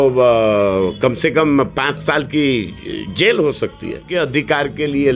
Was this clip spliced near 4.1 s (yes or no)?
yes